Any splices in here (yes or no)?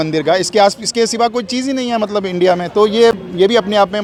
no